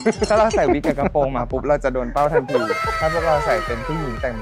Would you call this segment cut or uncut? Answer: uncut